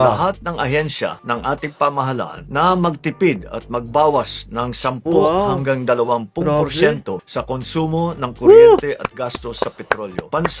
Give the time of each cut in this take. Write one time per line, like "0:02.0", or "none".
none